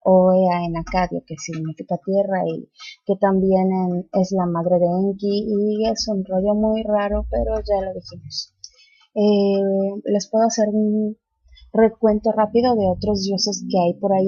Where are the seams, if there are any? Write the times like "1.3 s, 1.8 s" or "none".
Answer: 13.3 s